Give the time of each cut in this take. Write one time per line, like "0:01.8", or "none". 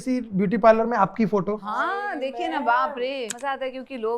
0:01.7
0:03.3